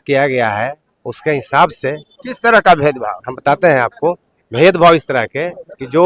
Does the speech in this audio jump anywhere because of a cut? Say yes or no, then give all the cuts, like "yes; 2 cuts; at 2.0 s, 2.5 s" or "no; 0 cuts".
no; 0 cuts